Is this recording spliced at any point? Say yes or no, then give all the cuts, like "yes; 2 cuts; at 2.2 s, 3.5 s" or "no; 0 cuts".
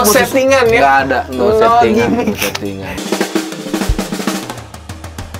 yes; 1 cut; at 2.9 s